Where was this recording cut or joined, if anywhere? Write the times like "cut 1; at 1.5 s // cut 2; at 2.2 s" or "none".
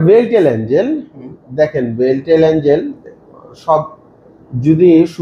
none

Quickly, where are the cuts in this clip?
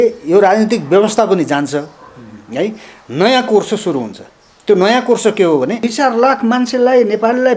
cut 1; at 5.8 s

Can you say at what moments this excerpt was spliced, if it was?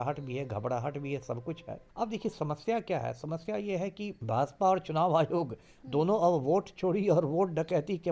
cut 1; at 1.8 s // cut 2; at 4.2 s

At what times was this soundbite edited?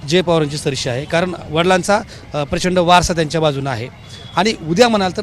none

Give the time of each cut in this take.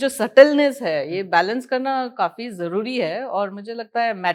none

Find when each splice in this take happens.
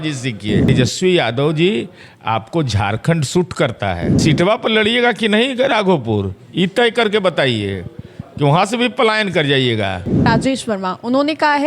cut 1; at 0.7 s // cut 2; at 4.1 s // cut 3; at 10.3 s

